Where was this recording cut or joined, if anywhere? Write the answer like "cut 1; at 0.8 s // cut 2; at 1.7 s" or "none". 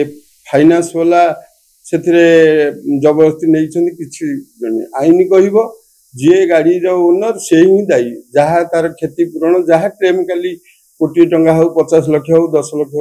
none